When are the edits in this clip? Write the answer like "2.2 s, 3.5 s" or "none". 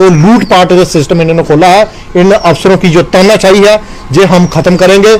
none